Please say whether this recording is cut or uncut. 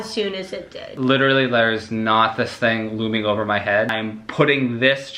cut